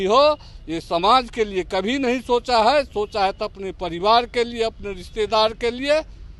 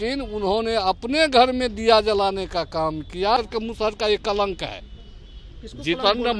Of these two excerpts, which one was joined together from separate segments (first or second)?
second